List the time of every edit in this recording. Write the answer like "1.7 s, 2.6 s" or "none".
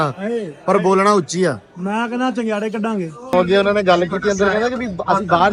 3.3 s